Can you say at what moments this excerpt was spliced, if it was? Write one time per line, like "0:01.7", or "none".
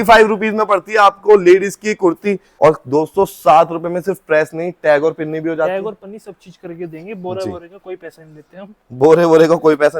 0:02.5